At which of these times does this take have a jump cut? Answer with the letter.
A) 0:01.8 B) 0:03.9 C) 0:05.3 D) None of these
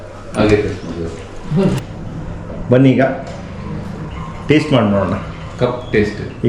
A